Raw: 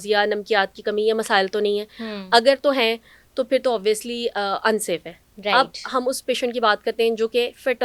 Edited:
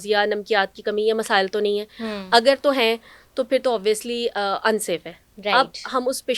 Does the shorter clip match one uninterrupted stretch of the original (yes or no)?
yes